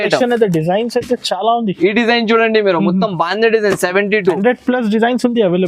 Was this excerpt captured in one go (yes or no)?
no